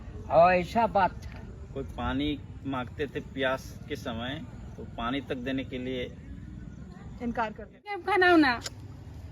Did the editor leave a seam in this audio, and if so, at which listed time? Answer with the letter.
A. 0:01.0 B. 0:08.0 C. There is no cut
B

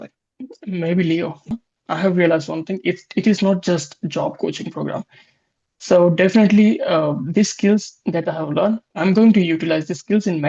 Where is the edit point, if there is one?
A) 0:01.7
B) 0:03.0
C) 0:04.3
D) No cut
A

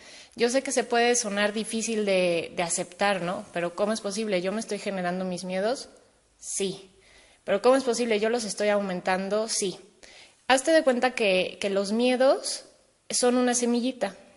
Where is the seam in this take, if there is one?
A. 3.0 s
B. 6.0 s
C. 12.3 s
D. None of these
A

